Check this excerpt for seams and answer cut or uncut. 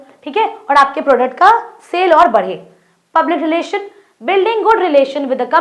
uncut